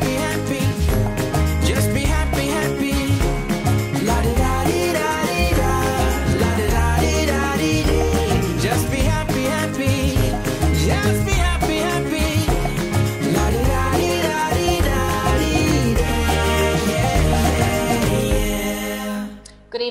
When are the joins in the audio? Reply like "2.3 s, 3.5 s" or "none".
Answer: none